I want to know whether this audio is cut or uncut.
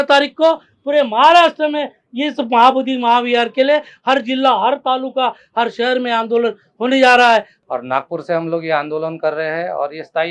cut